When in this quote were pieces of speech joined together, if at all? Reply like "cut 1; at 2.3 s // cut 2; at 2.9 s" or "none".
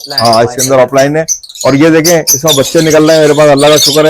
none